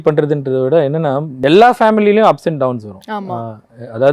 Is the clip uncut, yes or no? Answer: no